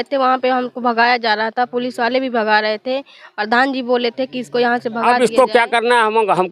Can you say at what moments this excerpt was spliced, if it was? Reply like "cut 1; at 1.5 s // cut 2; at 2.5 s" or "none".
cut 1; at 5.2 s